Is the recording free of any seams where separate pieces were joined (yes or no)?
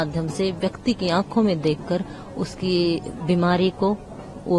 yes